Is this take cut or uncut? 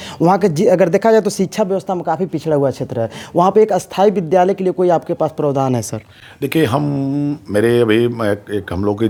uncut